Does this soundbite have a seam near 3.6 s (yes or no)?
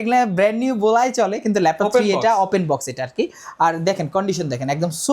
no